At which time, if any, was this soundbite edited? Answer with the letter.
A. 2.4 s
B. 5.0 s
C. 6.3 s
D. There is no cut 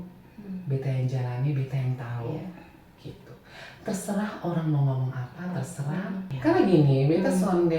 C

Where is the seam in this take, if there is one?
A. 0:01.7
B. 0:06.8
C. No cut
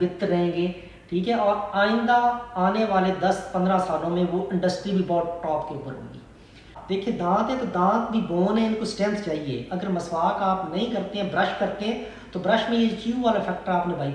B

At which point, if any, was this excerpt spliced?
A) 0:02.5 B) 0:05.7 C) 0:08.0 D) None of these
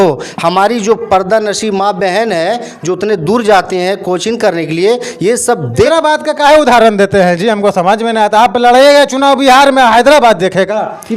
B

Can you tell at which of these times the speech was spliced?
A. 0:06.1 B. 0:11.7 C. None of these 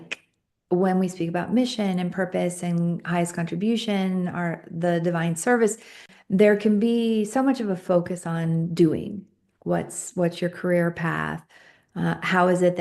A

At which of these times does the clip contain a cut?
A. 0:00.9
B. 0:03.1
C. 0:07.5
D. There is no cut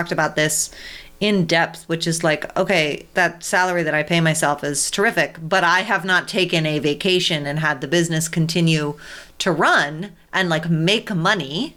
B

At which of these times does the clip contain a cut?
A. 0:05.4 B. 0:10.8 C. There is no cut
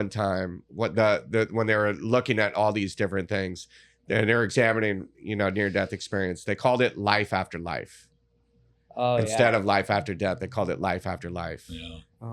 C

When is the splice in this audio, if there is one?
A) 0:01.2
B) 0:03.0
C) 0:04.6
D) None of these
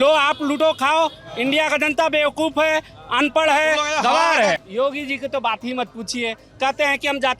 C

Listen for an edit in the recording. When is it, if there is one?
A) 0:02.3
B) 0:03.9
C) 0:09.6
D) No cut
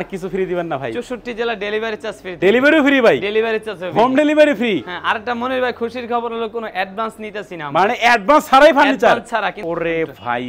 C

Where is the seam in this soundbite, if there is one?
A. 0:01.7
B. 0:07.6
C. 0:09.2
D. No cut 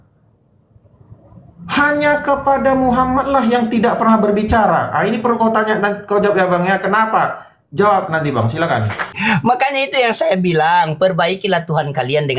C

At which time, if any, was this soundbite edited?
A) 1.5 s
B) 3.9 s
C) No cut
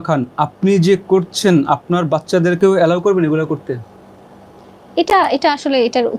C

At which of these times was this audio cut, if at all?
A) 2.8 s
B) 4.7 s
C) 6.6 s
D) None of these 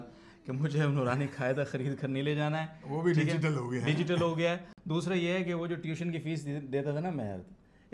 D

